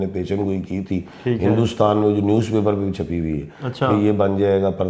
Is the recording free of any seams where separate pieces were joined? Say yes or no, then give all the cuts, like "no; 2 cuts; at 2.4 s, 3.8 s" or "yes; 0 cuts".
yes; 0 cuts